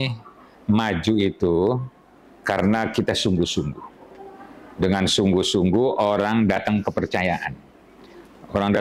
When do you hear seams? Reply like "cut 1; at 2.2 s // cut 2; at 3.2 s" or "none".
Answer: none